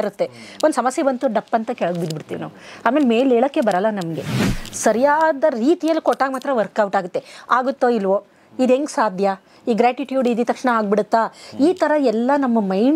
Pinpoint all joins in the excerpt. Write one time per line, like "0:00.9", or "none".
0:04.4